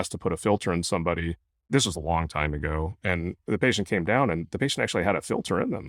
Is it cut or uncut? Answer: uncut